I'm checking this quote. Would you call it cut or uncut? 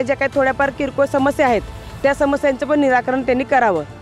uncut